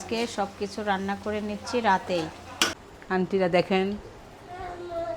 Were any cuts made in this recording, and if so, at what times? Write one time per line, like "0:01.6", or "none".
0:02.7